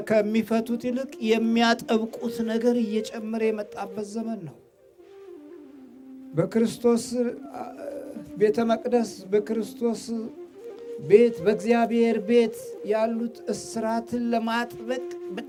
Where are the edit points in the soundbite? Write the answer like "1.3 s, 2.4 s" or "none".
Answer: none